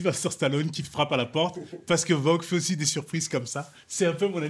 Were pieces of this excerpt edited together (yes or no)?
no